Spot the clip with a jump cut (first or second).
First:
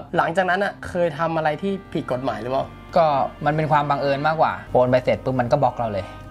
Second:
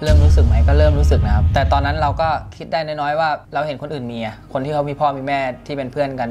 first